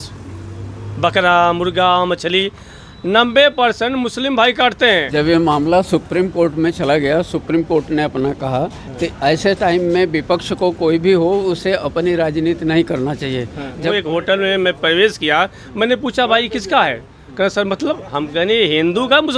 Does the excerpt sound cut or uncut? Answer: cut